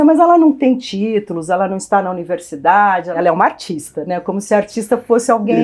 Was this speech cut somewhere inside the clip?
yes; 1 cut; at 3.1 s

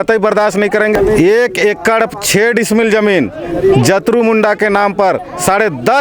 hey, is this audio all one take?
no; 1 cut; at 1.0 s

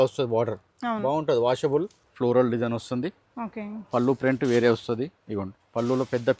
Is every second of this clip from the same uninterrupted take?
no; 1 cut; at 2.0 s

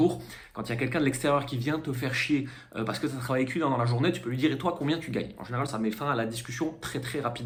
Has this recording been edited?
no; 0 cuts

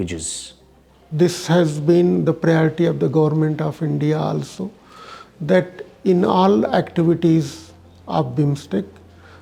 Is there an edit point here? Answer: yes; 1 cut; at 1.0 s

